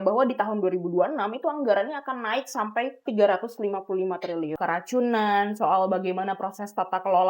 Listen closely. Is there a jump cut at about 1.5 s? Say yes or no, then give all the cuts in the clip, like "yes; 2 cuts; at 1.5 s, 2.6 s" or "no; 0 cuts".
no; 2 cuts; at 3.1 s, 4.5 s